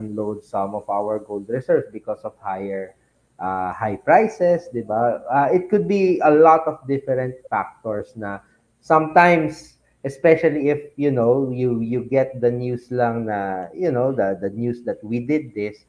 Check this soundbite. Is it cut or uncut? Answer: uncut